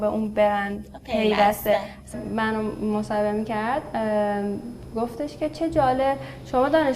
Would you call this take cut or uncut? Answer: cut